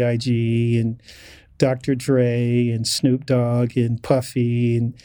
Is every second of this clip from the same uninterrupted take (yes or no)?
yes